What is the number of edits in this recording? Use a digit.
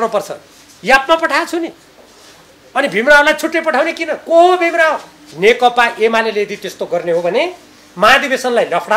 1